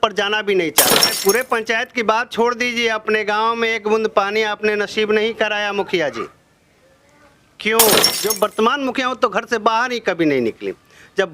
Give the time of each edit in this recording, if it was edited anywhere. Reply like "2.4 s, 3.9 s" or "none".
1.1 s, 8.2 s